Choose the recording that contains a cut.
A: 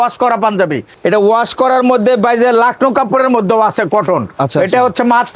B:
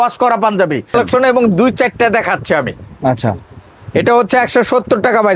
B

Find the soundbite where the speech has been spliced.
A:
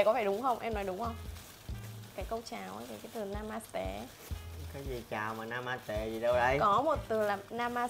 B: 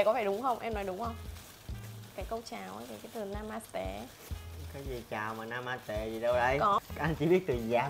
B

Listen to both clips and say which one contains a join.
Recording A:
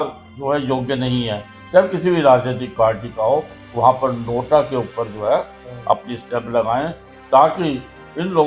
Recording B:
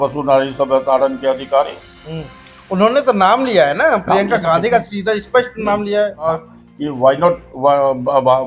B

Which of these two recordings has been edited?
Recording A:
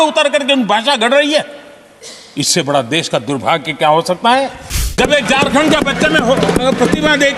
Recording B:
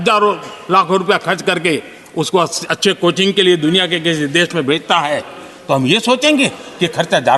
A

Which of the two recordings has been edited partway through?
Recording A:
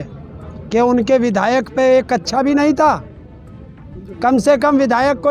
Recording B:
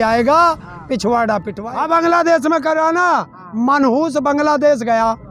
B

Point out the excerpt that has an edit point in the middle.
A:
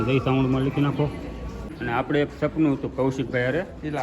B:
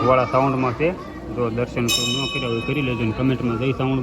A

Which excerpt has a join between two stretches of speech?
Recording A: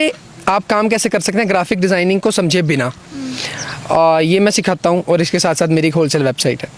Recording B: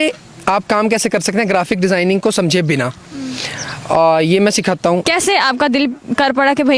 B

